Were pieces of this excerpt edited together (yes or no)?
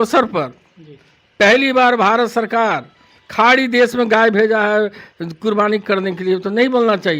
no